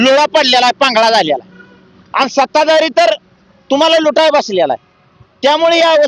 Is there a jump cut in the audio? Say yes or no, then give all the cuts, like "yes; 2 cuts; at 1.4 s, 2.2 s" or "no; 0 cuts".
no; 0 cuts